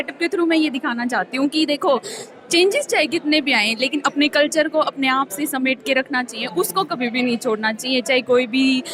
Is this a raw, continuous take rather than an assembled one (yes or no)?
yes